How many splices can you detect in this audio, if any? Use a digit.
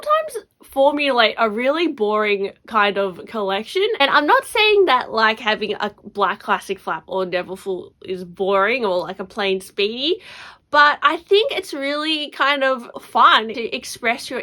1